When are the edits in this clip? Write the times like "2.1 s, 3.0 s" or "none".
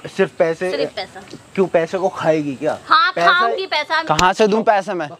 none